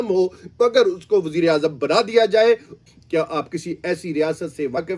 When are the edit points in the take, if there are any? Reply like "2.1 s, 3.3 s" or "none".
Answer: 2.7 s